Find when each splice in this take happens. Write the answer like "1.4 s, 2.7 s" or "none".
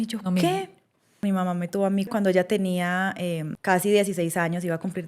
1.2 s, 2.1 s, 3.5 s